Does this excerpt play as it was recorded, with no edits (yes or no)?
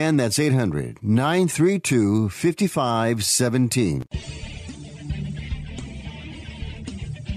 no